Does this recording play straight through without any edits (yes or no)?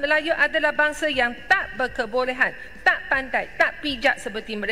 yes